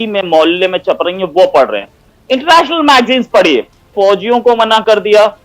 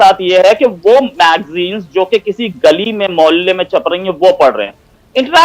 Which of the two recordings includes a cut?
first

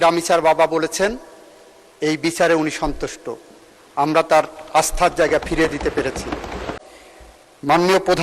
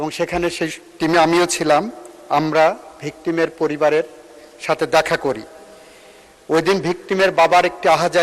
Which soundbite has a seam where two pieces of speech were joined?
first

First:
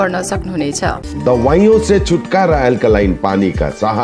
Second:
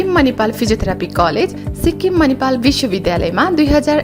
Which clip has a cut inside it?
first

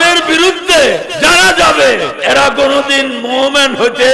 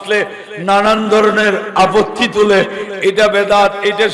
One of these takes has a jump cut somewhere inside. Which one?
first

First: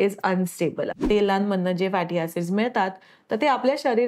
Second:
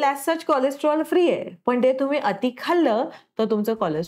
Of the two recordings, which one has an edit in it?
first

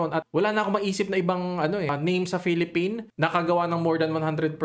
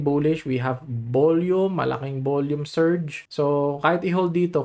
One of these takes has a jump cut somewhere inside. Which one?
first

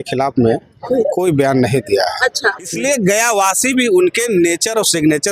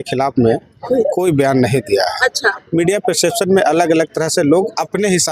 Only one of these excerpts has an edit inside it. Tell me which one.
first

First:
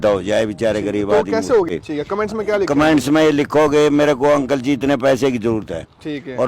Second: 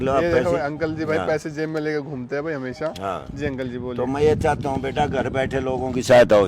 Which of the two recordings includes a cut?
first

